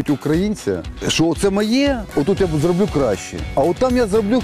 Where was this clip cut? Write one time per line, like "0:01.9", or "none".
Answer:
none